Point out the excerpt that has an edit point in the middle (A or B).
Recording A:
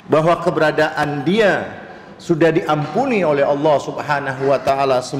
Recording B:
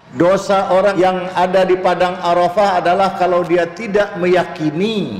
B